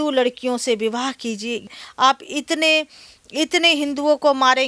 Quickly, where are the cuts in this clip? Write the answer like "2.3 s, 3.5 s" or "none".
1.7 s